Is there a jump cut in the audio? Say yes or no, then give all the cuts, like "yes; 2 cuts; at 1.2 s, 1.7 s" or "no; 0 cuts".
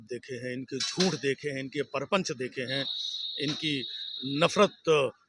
no; 0 cuts